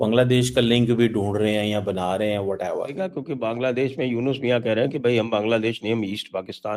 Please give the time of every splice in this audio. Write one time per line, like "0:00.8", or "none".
0:02.9